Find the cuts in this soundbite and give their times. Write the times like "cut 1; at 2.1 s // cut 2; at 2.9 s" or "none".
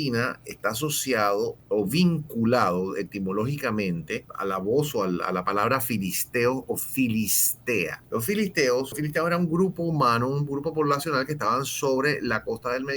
cut 1; at 1.6 s // cut 2; at 4.3 s // cut 3; at 8.0 s // cut 4; at 9.0 s